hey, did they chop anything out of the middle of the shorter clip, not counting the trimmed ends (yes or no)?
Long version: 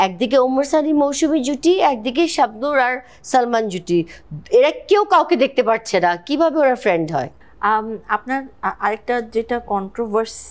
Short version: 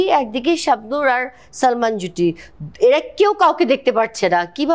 no